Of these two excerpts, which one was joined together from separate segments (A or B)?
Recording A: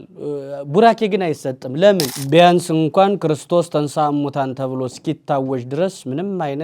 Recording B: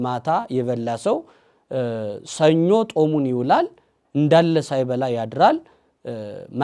A